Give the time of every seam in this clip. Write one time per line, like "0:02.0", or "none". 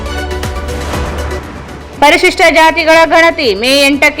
0:01.5

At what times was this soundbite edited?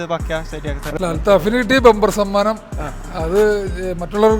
0:01.0

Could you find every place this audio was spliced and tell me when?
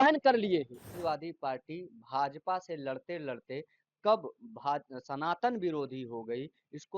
0:00.9

